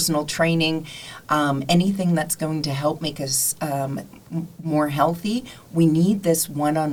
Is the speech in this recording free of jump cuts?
yes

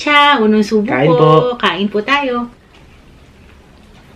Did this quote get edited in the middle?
yes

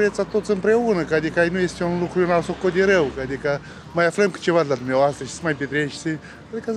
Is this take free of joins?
yes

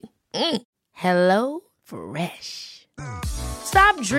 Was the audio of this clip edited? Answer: no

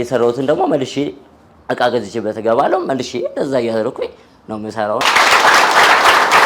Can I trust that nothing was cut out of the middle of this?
no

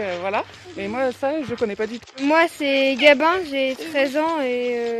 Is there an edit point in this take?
yes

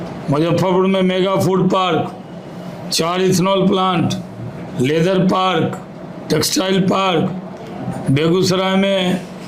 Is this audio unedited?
yes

